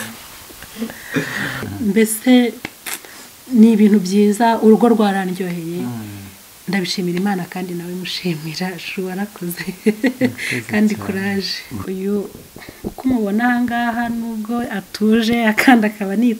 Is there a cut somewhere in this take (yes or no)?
yes